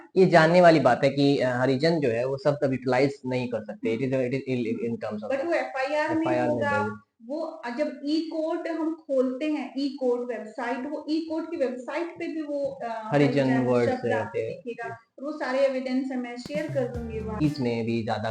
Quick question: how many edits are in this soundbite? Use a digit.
1